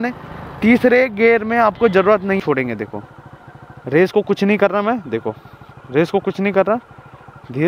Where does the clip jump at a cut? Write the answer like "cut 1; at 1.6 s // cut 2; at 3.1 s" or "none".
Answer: cut 1; at 2.4 s